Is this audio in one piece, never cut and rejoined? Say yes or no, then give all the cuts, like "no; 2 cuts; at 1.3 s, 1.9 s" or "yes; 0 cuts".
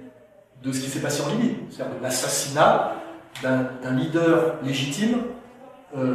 yes; 0 cuts